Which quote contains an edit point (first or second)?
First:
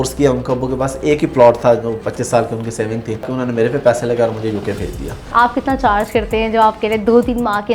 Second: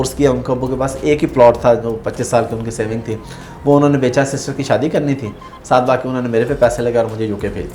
first